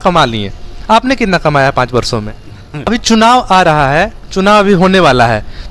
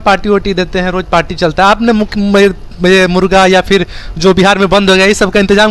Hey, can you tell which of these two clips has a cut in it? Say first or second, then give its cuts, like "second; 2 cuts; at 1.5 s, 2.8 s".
first; 1 cut; at 2.9 s